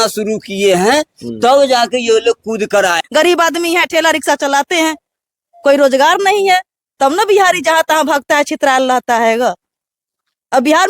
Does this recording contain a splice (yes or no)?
yes